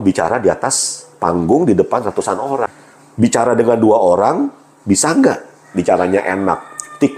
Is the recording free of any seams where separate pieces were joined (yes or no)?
no